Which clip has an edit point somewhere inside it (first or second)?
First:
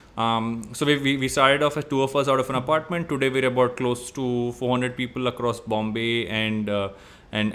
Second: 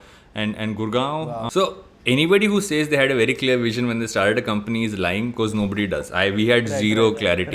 second